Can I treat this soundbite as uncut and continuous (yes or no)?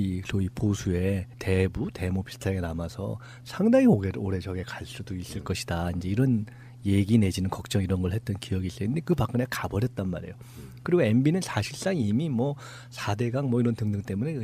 no